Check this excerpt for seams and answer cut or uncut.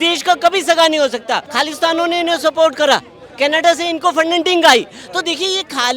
cut